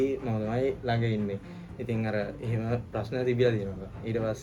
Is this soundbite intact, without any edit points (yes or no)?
yes